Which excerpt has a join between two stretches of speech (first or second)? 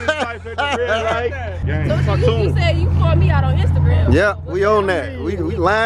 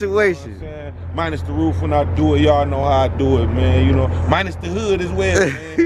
first